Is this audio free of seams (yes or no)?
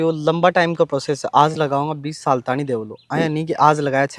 yes